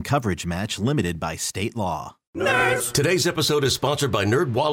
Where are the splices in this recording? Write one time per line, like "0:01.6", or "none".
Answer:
0:02.2